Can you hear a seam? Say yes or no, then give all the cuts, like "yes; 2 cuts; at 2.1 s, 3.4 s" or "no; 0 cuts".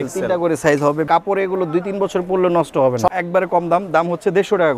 yes; 2 cuts; at 1.1 s, 3.1 s